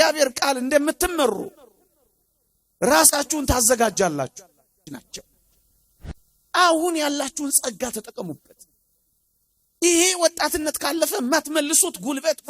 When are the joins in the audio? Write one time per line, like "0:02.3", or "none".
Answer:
0:04.8